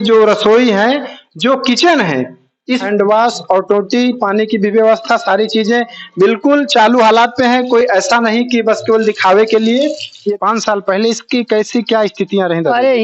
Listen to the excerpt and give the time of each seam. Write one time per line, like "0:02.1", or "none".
0:02.8
0:10.3